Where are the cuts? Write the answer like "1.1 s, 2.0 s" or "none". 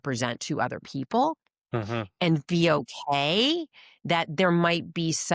none

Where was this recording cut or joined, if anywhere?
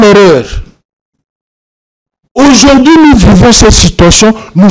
none

